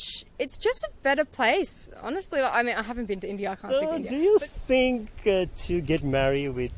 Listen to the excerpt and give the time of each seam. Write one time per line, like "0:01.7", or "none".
0:03.6